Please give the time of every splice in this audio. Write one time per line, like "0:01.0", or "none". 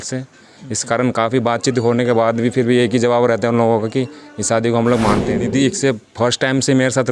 0:05.4